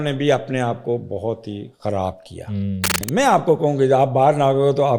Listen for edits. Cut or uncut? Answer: cut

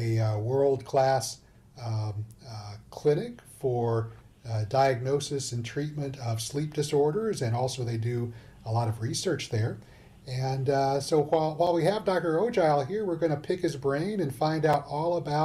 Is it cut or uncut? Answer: uncut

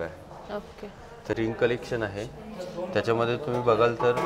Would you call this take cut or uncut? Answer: cut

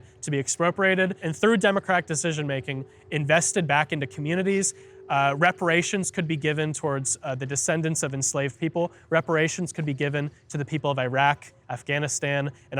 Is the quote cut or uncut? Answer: cut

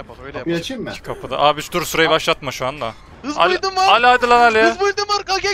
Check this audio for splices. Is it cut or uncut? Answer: cut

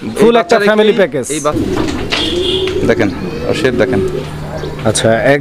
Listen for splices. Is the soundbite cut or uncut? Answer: cut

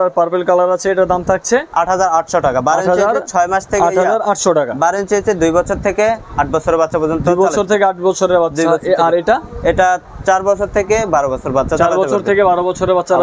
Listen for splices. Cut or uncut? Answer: uncut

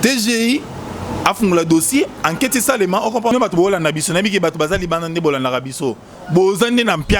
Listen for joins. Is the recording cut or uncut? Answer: cut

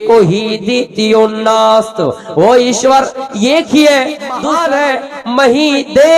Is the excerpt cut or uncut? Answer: cut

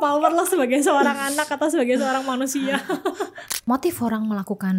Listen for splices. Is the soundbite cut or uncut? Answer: cut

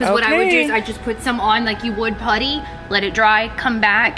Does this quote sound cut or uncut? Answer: uncut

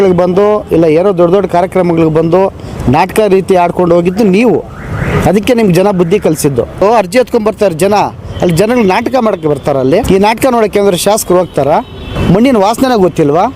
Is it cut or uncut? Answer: cut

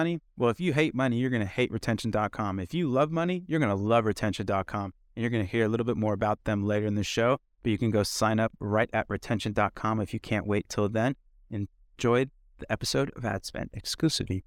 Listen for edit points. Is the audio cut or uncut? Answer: uncut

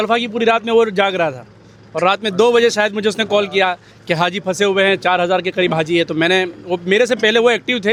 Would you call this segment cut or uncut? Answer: uncut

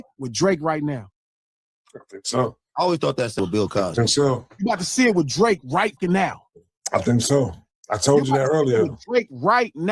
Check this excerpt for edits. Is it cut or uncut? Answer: cut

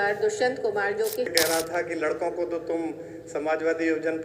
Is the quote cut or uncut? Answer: cut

